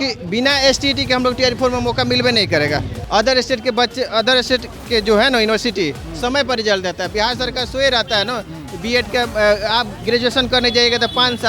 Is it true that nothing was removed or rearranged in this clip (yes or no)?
no